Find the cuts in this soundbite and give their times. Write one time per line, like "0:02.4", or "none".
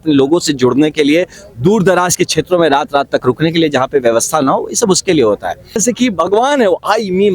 0:05.8